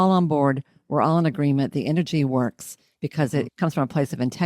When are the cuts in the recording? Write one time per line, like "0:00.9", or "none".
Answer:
0:03.5